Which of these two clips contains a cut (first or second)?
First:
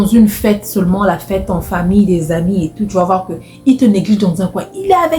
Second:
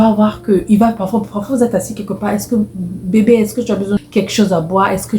second